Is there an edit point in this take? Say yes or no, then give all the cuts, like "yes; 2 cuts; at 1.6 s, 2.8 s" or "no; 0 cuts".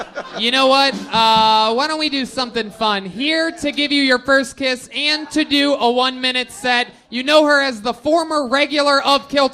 no; 0 cuts